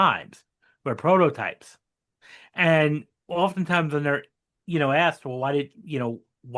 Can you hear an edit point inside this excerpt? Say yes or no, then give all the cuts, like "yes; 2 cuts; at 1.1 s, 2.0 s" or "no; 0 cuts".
no; 0 cuts